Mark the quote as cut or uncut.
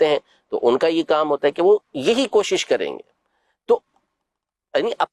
uncut